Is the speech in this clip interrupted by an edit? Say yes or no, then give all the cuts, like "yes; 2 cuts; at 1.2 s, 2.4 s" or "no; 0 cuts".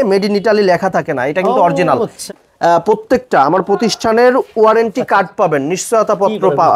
yes; 1 cut; at 2.2 s